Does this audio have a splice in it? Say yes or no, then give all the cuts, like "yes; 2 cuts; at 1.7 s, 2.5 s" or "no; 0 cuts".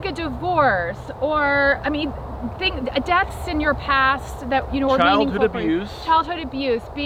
no; 0 cuts